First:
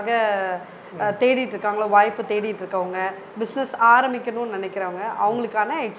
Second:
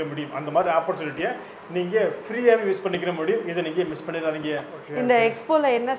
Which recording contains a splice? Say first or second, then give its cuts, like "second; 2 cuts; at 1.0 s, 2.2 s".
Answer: second; 1 cut; at 4.8 s